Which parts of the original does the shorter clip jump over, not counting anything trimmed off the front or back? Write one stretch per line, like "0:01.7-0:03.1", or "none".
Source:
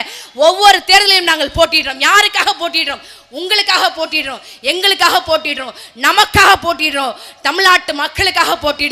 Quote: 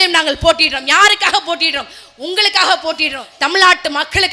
0:04.4-0:07.3